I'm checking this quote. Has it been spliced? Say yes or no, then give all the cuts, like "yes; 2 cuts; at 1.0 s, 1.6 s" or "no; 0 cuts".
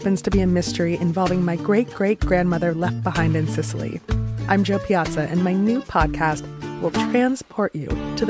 no; 0 cuts